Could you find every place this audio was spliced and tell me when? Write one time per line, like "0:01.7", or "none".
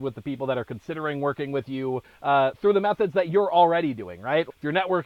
0:02.1